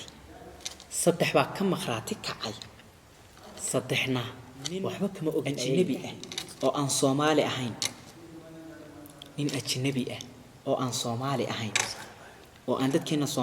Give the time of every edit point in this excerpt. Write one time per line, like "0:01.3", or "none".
0:05.8